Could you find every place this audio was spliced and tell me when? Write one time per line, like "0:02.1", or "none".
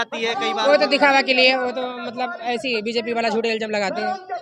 none